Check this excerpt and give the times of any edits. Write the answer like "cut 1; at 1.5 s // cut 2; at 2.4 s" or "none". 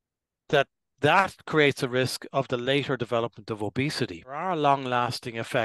cut 1; at 4.4 s

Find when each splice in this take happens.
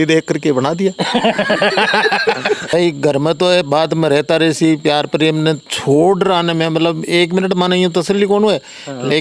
cut 1; at 2.7 s

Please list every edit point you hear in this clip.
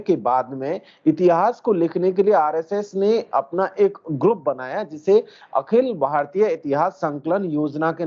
none

